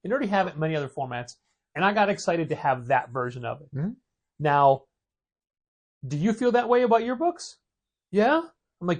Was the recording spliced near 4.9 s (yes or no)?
no